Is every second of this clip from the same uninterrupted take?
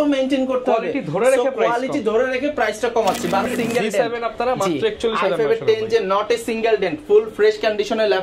no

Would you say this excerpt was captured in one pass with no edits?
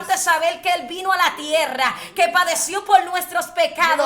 yes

